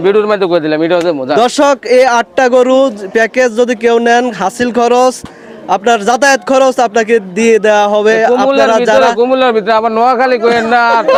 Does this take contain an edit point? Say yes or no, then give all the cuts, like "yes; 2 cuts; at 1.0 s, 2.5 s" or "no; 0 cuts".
no; 0 cuts